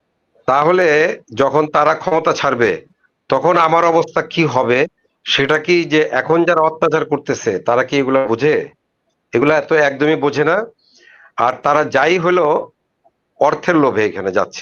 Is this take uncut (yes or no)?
yes